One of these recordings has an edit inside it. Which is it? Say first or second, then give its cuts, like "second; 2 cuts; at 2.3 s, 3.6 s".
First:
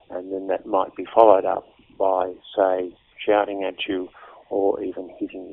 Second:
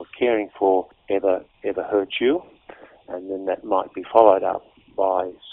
second; 1 cut; at 1.0 s